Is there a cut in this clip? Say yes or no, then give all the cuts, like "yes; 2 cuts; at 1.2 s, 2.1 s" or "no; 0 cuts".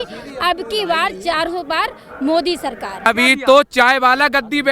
yes; 1 cut; at 3.1 s